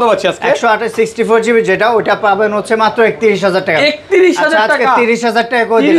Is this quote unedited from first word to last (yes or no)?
yes